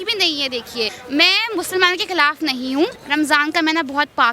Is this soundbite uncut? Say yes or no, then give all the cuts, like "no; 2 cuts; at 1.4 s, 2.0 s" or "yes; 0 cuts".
no; 2 cuts; at 1.0 s, 3.0 s